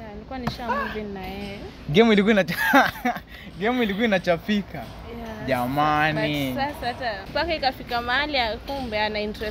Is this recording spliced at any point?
yes; 1 cut; at 7.2 s

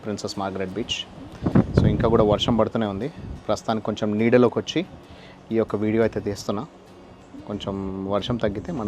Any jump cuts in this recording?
no; 0 cuts

